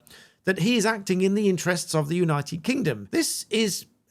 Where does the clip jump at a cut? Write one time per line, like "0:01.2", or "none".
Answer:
0:03.0